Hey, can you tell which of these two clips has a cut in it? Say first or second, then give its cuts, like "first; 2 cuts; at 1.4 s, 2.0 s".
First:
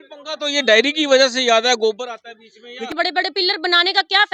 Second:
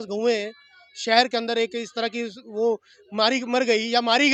first; 1 cut; at 2.9 s